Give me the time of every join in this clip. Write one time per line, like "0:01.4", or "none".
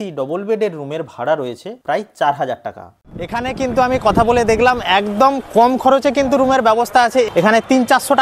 0:03.3
0:07.3